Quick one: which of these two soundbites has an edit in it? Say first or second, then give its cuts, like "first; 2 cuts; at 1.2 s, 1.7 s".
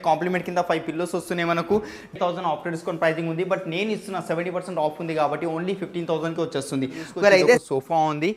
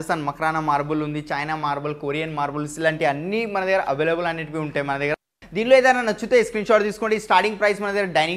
first; 2 cuts; at 2.1 s, 7.6 s